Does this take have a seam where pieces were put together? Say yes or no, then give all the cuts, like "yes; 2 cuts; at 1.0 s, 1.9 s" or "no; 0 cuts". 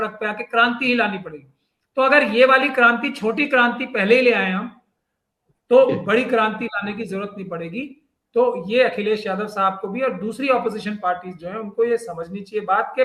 no; 0 cuts